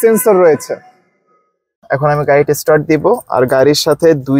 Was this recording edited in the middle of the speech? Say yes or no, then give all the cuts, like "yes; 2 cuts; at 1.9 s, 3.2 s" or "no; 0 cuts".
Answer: yes; 1 cut; at 1.8 s